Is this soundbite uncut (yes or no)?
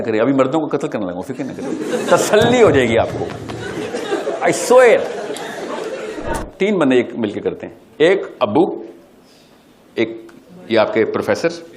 no